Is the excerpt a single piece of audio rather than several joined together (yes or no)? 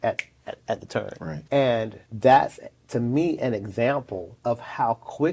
no